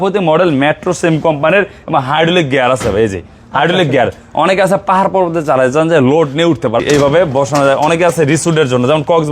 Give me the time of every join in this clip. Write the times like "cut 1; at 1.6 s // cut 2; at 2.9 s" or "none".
cut 1; at 6.8 s